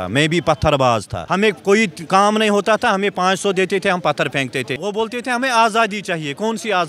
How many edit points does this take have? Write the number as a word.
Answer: two